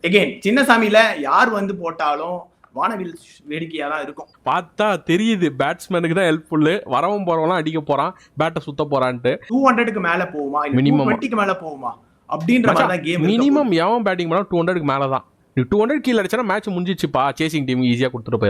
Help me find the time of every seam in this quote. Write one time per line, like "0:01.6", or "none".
0:04.3
0:09.4